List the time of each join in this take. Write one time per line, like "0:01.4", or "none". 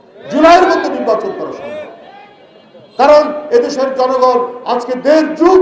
none